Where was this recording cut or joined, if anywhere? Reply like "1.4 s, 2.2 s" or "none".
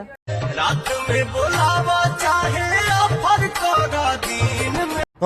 none